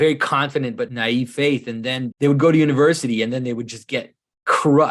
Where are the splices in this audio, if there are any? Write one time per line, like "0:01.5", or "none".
0:00.9
0:02.1